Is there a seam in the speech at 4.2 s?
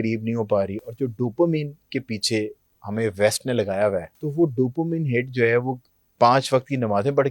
yes; 1 cut; at 4.2 s

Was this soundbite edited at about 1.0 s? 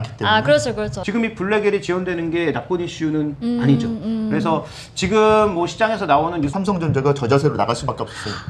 yes; 2 cuts; at 1.0 s, 6.5 s

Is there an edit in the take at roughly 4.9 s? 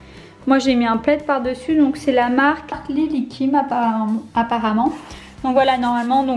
no; 1 cut; at 2.8 s

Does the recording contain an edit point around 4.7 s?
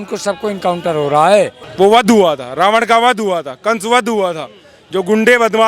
no; 1 cut; at 1.6 s

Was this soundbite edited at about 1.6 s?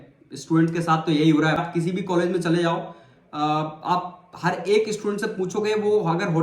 yes; 1 cut; at 1.6 s

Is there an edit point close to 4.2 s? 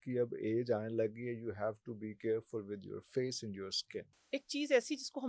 yes; 1 cut; at 4.2 s

